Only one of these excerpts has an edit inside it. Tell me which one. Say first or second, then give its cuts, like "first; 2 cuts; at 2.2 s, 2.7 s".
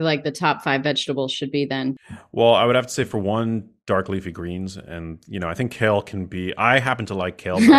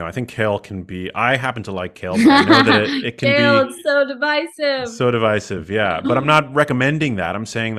first; 1 cut; at 2.0 s